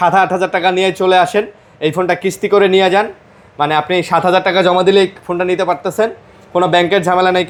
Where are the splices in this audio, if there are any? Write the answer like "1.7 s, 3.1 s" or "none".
none